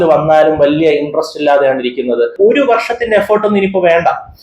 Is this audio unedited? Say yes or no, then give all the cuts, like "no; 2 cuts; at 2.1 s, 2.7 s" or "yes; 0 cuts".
no; 1 cut; at 2.3 s